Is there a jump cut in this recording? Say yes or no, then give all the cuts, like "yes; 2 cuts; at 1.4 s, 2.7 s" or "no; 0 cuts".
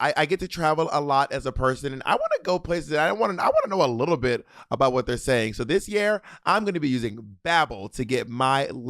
no; 0 cuts